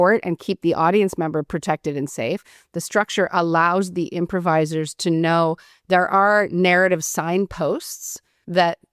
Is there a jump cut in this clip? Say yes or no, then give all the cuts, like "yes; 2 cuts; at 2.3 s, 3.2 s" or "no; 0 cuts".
no; 0 cuts